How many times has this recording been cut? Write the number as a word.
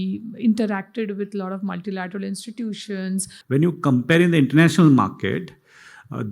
one